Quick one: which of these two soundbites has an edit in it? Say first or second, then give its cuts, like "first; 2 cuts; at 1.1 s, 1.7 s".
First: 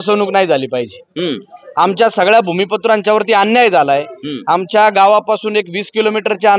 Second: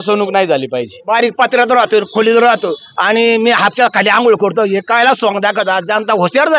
second; 2 cuts; at 1.0 s, 2.9 s